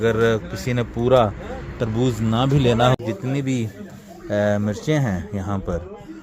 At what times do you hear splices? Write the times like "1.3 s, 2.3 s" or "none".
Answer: 2.9 s